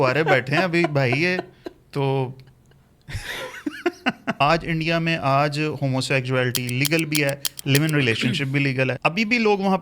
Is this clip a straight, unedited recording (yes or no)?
no